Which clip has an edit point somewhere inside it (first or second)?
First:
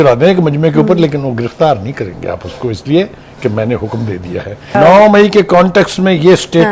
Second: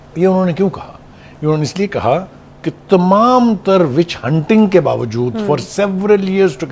first